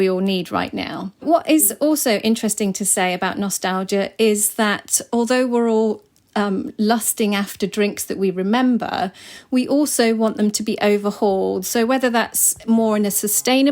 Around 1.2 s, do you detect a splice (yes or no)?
yes